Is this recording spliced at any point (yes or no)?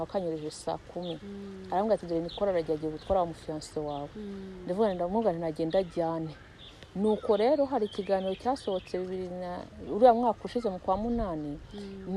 no